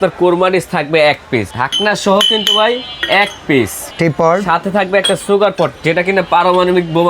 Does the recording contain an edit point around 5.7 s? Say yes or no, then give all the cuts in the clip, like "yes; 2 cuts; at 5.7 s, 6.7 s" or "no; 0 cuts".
no; 2 cuts; at 1.5 s, 3.9 s